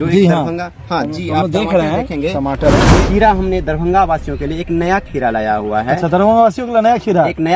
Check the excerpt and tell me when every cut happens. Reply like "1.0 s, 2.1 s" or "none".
3.0 s